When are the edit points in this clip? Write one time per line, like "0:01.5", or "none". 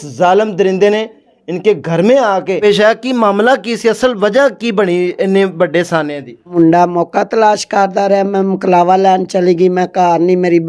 0:02.6
0:06.5